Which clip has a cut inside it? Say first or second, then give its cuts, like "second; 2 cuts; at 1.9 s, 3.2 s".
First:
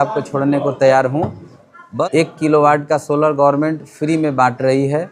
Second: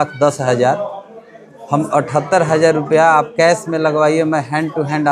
first; 1 cut; at 1.8 s